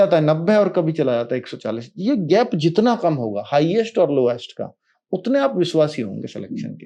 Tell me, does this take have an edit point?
no; 0 cuts

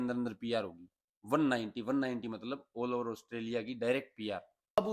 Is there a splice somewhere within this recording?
no; 0 cuts

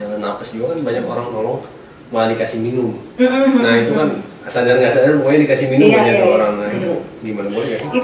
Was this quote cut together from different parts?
no; 0 cuts

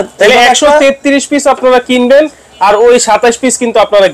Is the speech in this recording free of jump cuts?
yes; 0 cuts

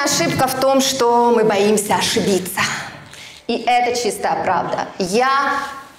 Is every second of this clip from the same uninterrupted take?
yes; 0 cuts

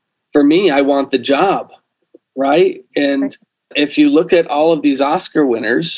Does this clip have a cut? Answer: yes; 1 cut; at 3.7 s

